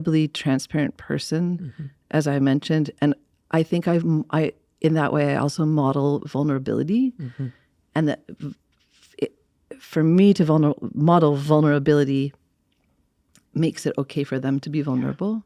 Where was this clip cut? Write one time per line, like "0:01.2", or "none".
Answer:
none